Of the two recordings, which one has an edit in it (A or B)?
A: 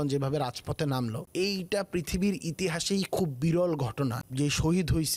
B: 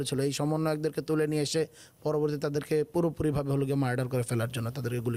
A